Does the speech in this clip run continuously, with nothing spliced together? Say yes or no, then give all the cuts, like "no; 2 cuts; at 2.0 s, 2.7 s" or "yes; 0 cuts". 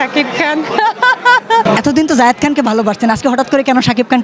no; 1 cut; at 1.6 s